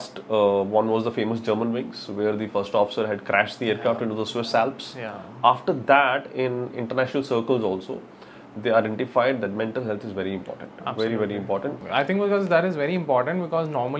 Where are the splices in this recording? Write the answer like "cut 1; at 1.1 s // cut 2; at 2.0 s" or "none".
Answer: cut 1; at 11.8 s